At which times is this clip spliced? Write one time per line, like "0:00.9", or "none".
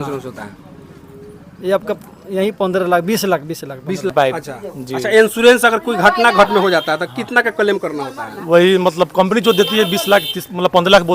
0:04.1